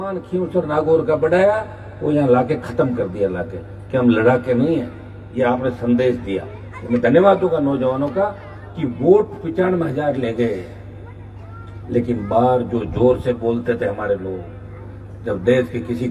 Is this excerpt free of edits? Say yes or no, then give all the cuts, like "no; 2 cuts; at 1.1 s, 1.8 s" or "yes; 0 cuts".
yes; 0 cuts